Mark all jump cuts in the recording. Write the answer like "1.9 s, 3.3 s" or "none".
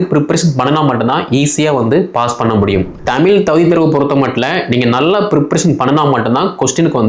2.9 s